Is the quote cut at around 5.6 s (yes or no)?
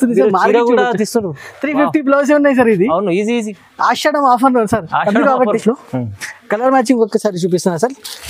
yes